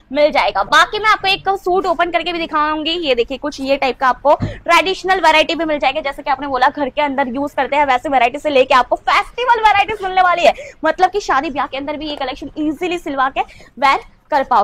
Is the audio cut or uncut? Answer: uncut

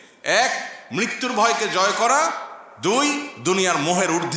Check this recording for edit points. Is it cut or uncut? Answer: uncut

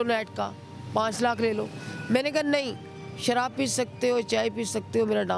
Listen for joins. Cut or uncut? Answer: uncut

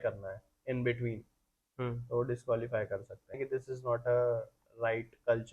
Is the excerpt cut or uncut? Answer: cut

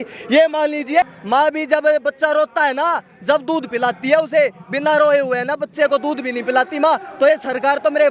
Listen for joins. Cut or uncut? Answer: cut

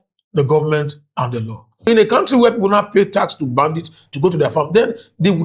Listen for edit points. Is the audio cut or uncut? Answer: cut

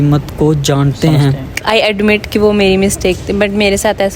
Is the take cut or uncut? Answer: cut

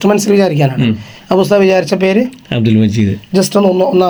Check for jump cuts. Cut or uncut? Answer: uncut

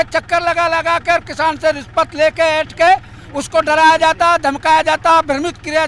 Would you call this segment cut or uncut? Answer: uncut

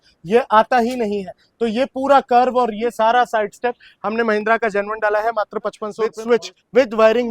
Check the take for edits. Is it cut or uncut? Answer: cut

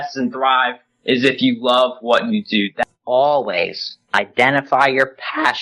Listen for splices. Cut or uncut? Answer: cut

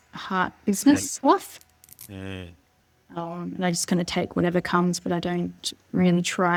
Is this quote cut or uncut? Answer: uncut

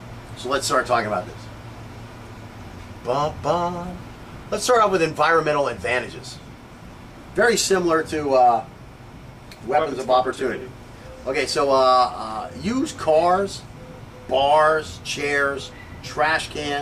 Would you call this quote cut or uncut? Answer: cut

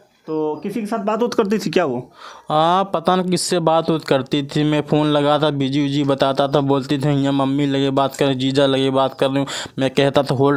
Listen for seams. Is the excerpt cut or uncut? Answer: uncut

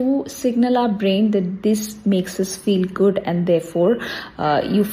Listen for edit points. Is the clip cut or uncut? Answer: uncut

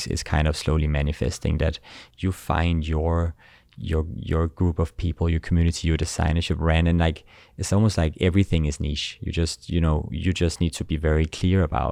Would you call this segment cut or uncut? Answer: uncut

